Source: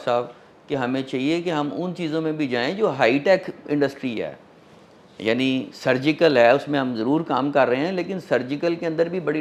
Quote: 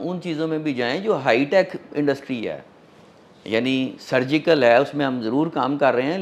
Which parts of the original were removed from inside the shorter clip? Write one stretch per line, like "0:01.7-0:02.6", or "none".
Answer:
none